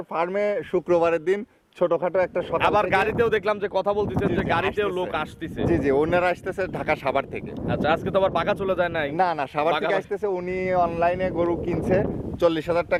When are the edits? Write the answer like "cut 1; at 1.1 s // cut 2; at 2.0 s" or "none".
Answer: none